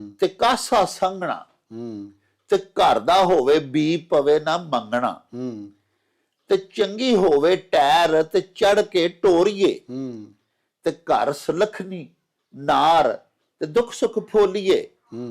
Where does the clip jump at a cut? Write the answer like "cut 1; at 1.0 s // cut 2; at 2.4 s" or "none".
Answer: none